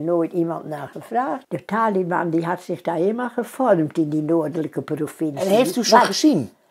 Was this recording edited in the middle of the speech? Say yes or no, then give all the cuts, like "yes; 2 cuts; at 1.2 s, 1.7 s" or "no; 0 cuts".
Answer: yes; 1 cut; at 1.4 s